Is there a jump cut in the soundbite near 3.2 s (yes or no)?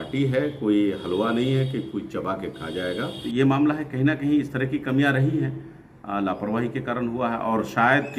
yes